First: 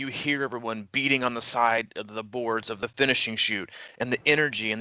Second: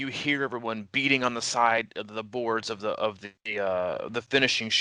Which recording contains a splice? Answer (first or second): first